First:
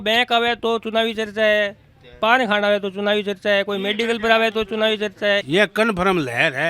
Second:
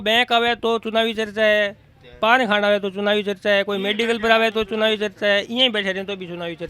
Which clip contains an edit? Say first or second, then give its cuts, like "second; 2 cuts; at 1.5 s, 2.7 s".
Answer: first; 1 cut; at 5.4 s